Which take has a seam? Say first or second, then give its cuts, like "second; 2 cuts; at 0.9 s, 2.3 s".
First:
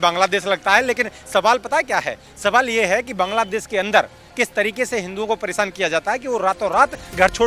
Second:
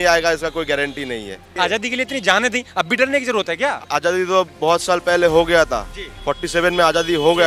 second; 2 cuts; at 1.4 s, 3.8 s